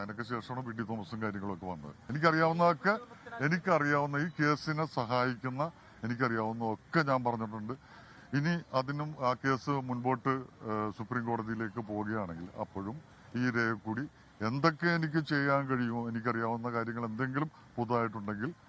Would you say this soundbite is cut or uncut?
cut